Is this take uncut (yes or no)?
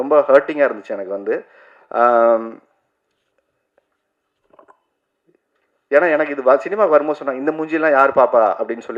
yes